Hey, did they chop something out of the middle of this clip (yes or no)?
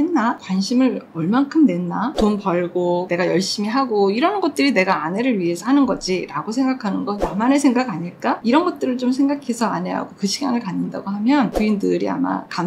yes